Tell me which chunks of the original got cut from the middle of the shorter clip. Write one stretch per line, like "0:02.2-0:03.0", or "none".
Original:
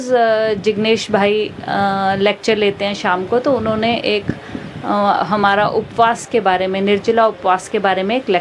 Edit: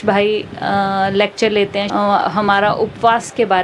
0:02.9-0:04.8